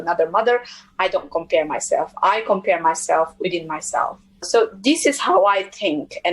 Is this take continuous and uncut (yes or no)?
no